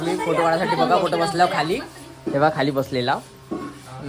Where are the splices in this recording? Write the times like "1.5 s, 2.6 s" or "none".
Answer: none